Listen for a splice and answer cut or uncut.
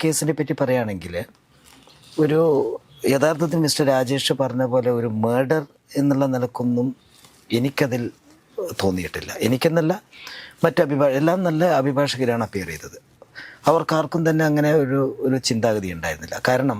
uncut